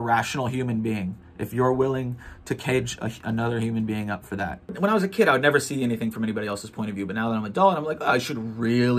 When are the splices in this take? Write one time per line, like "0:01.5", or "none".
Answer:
0:04.8